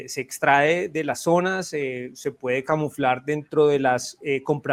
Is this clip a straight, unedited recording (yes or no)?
yes